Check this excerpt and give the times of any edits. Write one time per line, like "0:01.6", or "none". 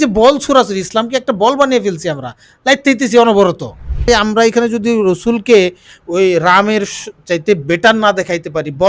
0:04.0